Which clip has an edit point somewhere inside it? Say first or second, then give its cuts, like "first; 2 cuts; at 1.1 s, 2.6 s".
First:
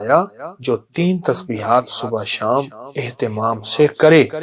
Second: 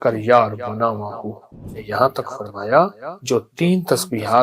second; 1 cut; at 1.7 s